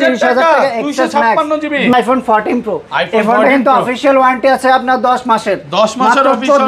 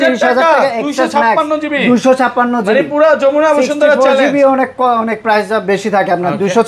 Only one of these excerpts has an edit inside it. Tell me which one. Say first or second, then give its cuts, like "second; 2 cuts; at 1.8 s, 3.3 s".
first; 1 cut; at 1.9 s